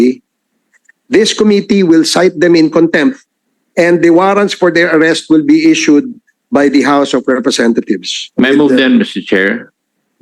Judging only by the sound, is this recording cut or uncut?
cut